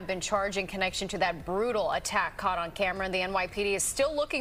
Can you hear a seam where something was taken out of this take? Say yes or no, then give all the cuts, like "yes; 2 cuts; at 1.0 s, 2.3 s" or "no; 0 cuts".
no; 0 cuts